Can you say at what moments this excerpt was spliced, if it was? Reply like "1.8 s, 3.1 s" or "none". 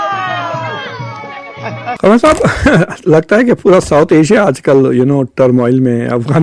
2.0 s

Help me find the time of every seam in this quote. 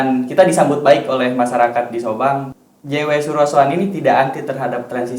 2.5 s

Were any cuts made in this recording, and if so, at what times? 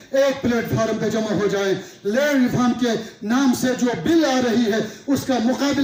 none

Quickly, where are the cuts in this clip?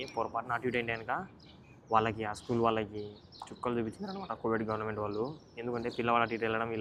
none

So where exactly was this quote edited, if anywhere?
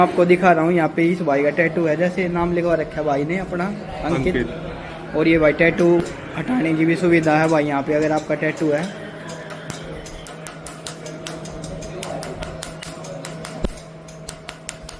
none

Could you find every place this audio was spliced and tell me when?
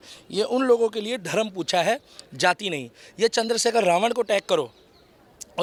none

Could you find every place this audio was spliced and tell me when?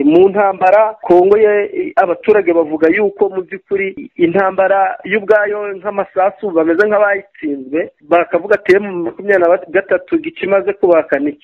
1.0 s, 4.0 s, 8.0 s

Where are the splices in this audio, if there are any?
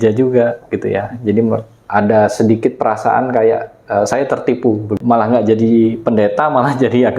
4.9 s

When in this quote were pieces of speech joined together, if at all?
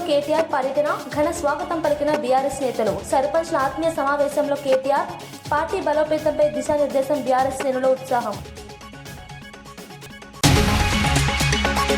10.1 s

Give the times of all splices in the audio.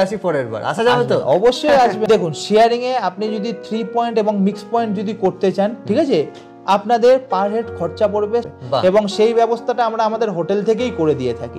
2.0 s, 8.5 s

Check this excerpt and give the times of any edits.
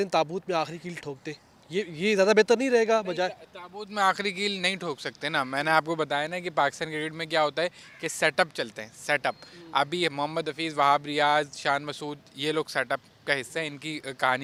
none

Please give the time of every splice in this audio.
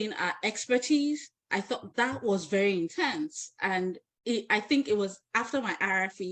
none

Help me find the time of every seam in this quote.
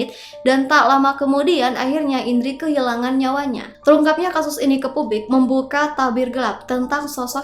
3.7 s

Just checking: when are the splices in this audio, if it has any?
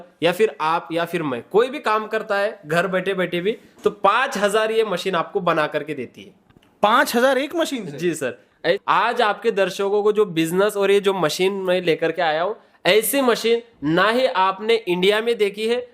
8.6 s

